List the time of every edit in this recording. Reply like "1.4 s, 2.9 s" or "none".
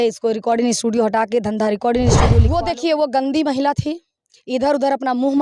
2.4 s